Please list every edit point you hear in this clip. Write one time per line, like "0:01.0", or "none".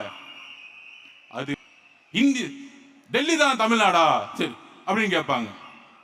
0:01.5

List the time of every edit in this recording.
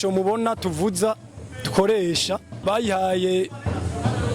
0:02.6

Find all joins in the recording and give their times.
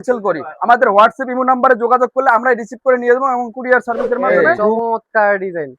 0:04.2

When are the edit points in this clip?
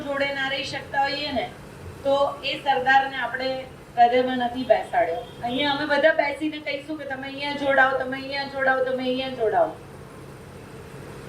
0:05.3

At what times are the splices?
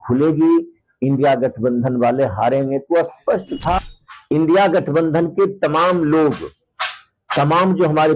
0:03.8

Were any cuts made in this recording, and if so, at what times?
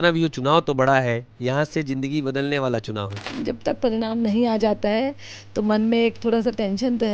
0:03.3

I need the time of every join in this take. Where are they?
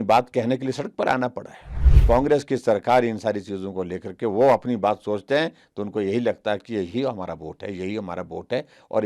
0:01.9

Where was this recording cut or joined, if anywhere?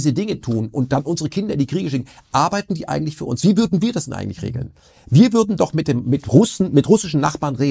none

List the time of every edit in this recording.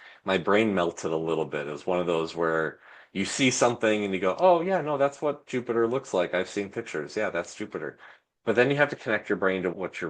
0:09.0

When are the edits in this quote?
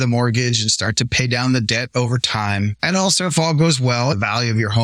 0:02.8
0:04.1

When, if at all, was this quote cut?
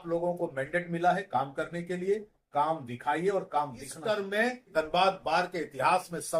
0:03.9
0:04.7

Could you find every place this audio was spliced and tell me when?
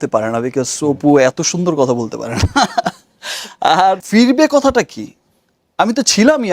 0:04.0

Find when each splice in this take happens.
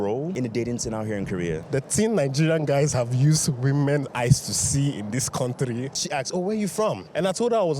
0:06.0

